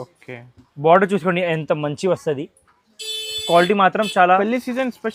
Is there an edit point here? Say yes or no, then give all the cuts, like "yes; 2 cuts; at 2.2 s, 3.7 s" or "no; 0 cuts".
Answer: no; 0 cuts